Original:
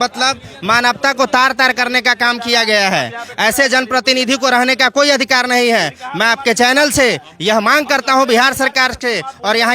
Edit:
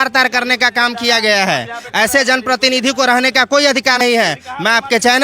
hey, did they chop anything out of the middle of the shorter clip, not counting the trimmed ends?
yes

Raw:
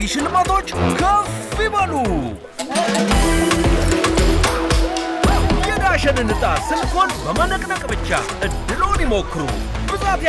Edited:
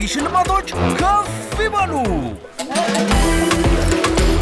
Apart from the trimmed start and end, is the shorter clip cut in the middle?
no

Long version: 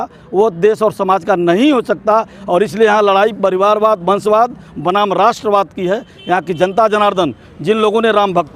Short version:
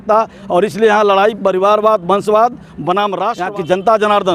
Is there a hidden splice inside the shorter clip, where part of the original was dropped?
yes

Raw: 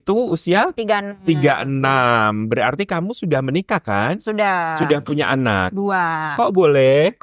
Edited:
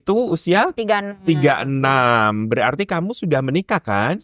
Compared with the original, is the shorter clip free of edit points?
yes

